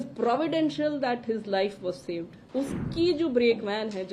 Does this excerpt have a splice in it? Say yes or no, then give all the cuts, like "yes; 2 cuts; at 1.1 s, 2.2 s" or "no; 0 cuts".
yes; 1 cut; at 2.4 s